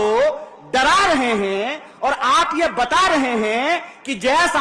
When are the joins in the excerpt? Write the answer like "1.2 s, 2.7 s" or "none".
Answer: none